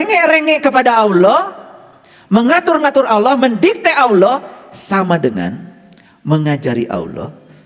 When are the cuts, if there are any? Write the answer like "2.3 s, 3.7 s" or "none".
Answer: none